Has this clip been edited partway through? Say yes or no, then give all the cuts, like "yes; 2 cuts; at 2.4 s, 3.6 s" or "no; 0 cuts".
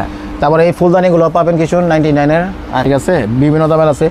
yes; 1 cut; at 2.9 s